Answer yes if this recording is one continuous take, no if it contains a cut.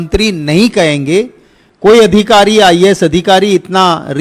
yes